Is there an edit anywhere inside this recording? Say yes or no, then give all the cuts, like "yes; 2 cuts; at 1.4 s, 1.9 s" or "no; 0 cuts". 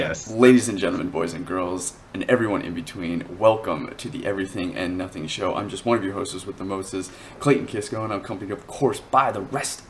yes; 1 cut; at 2.1 s